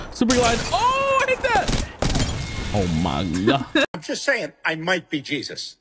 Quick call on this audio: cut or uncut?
uncut